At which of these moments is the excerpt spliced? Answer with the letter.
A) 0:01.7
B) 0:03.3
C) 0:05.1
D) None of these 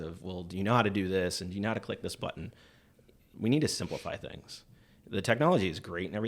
B